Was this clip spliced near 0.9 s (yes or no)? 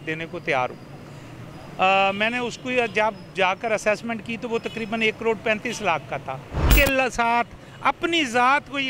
no